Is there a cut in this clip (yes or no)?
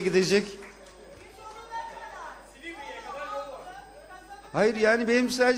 no